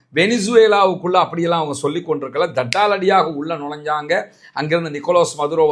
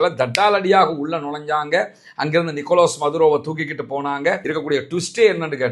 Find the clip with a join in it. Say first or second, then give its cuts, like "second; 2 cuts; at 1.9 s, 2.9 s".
second; 1 cut; at 4.4 s